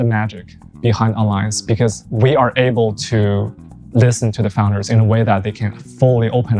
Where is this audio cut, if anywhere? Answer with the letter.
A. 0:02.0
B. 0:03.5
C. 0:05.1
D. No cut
A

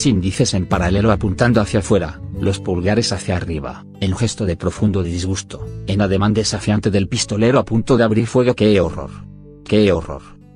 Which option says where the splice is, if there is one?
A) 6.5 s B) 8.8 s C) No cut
B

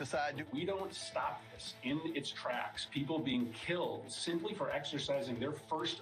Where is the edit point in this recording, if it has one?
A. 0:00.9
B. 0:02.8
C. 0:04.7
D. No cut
B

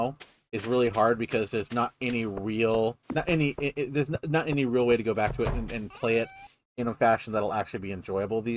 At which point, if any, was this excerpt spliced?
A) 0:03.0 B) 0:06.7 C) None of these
A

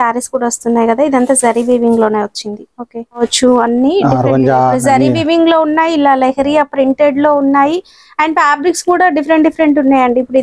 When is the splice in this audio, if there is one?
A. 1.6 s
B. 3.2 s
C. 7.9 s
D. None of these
B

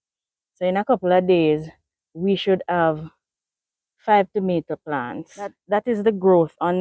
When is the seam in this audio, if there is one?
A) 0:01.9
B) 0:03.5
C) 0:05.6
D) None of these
C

